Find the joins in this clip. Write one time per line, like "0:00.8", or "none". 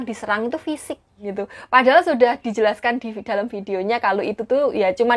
0:01.3